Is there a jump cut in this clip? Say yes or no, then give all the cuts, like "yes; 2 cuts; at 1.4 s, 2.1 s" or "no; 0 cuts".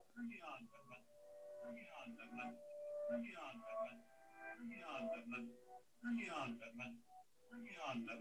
no; 0 cuts